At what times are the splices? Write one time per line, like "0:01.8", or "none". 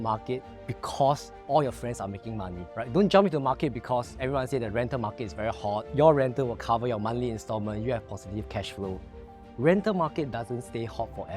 0:02.6
0:05.9